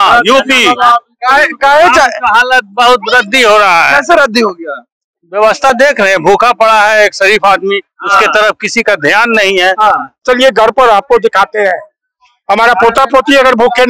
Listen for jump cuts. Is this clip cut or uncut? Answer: cut